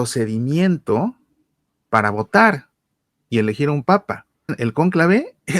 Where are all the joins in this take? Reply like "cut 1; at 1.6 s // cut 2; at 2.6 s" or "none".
cut 1; at 4.6 s